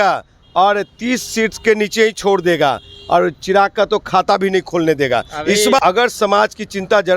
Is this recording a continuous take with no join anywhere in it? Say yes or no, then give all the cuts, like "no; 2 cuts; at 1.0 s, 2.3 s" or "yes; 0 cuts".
no; 1 cut; at 5.8 s